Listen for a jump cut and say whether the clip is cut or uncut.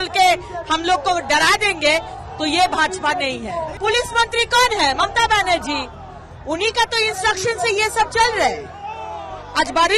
cut